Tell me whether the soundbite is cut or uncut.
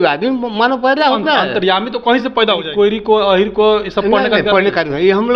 cut